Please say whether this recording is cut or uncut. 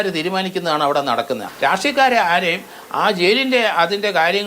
cut